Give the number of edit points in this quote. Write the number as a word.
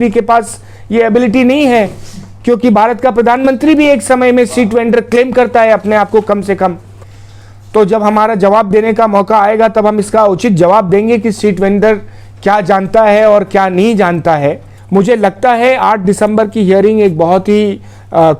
two